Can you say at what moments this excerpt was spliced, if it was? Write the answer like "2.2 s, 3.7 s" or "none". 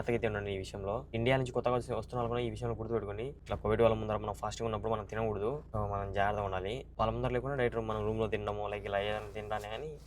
1.1 s, 3.4 s, 5.6 s, 6.9 s